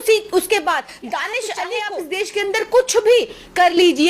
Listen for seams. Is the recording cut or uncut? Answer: cut